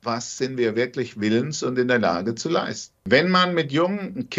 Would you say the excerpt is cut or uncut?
cut